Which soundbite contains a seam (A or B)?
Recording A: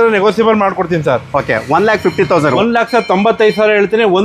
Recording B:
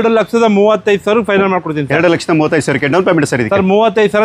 A